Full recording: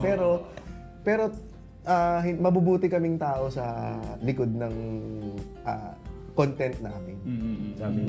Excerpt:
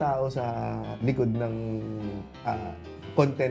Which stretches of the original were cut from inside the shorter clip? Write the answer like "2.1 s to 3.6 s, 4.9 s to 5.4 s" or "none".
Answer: none

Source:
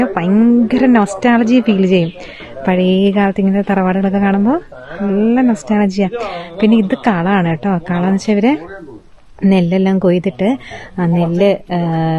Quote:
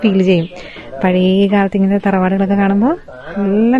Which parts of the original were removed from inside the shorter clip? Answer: none

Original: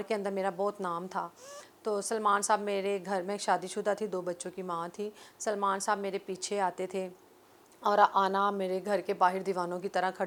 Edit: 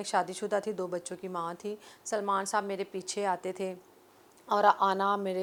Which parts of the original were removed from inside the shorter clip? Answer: none

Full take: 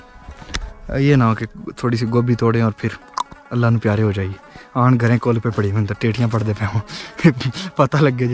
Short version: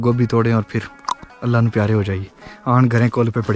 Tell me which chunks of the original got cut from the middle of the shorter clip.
none

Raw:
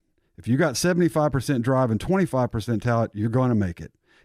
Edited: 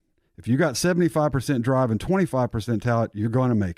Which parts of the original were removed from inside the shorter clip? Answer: none

